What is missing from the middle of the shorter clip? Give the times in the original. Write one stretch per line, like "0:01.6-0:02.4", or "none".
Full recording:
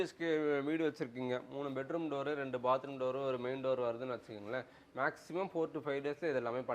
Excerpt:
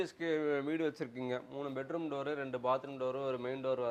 none